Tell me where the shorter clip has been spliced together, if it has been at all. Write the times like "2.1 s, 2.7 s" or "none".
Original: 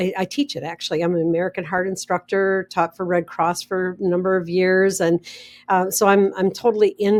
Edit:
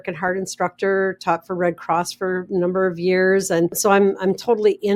3.8 s